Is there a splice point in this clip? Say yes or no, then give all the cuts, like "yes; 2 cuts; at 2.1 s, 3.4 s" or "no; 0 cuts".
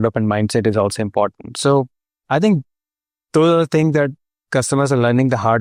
no; 0 cuts